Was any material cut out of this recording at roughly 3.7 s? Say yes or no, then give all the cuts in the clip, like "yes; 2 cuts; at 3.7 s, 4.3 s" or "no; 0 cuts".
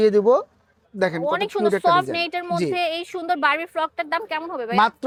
no; 0 cuts